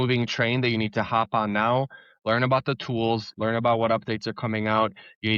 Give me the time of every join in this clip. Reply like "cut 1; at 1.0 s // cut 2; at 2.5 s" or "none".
none